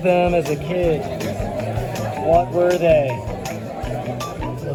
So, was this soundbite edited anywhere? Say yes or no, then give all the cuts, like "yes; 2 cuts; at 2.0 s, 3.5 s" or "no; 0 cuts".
no; 0 cuts